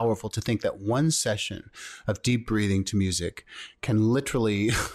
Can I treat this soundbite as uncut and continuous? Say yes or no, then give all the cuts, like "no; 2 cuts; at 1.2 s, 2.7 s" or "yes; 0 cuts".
yes; 0 cuts